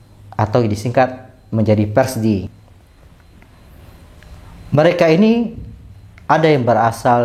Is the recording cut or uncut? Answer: cut